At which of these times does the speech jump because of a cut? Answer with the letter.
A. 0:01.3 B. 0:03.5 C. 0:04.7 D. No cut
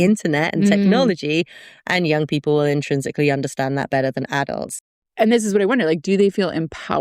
C